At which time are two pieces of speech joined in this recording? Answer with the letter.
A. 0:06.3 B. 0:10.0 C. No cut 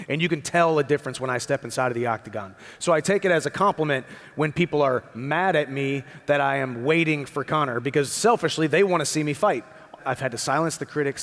B